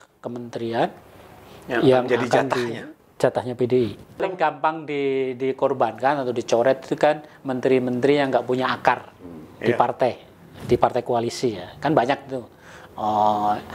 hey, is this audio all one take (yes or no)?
no